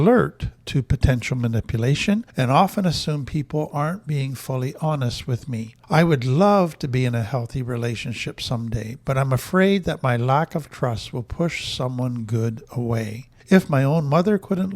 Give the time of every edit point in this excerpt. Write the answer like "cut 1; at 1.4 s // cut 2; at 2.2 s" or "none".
cut 1; at 2.3 s // cut 2; at 5.8 s // cut 3; at 13.3 s